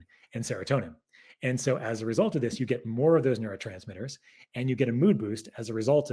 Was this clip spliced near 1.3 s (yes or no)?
no